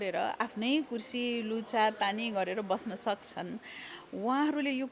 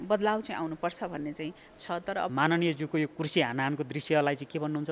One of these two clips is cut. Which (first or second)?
second